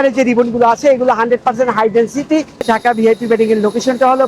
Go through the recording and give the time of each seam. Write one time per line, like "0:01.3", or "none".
0:02.6

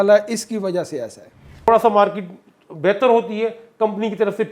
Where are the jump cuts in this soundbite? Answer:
0:01.7

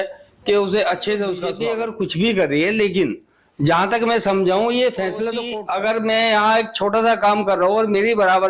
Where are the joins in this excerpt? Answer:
0:01.5
0:05.4

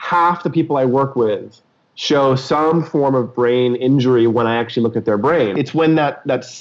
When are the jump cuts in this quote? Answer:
0:05.5

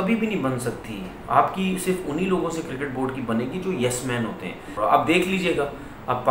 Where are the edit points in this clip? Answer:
0:04.8

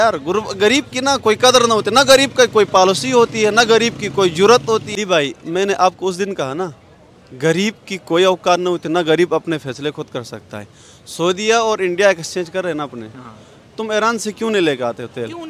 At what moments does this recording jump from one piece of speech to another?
0:04.9

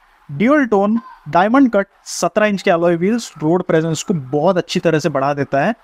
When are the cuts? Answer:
none

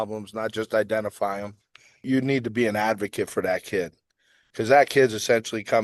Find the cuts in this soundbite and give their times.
0:02.0

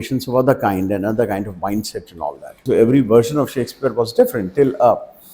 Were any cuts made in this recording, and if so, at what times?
0:02.6

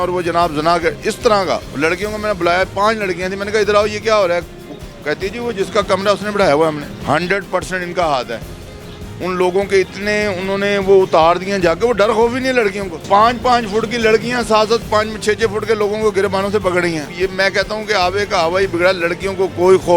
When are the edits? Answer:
0:01.7
0:06.9
0:13.0
0:17.1

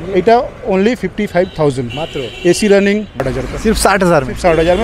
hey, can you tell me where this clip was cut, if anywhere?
0:03.3

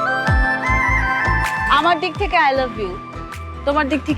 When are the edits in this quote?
0:01.6

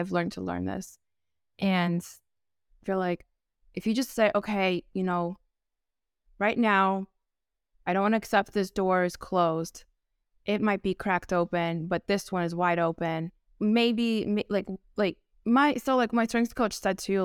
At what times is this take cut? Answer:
0:13.4

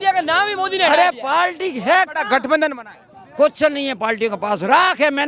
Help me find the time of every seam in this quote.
none

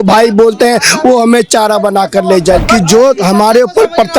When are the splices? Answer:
0:02.6

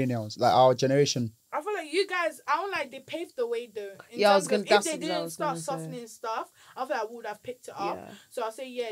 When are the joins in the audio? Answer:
0:01.4

